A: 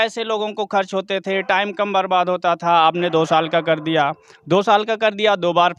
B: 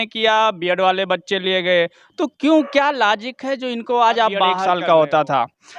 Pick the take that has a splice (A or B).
B